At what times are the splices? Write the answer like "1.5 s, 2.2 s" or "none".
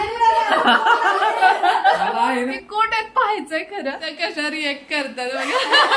2.6 s, 4.0 s